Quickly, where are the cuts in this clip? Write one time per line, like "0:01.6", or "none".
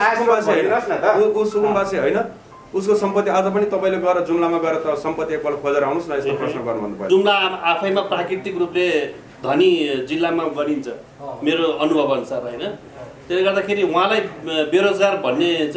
0:06.9